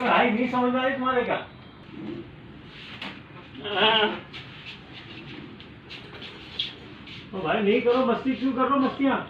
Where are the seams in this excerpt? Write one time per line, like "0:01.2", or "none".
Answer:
0:01.8

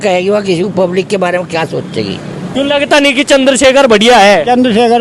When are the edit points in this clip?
0:02.4

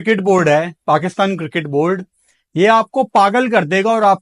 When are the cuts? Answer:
none

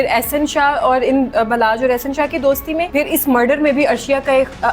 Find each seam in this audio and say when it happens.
0:02.9

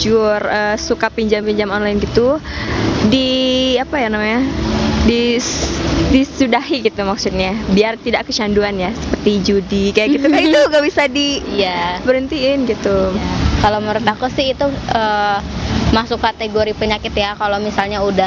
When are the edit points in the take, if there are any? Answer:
none

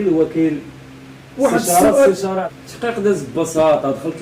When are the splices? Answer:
0:02.4

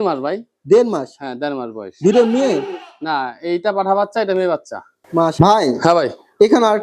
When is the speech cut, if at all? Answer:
0:05.3

